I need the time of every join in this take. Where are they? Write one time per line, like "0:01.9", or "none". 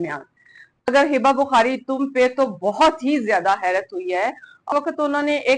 0:00.9
0:04.7